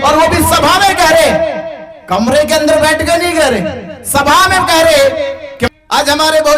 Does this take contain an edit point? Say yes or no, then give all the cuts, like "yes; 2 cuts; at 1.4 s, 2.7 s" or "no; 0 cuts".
yes; 1 cut; at 5.7 s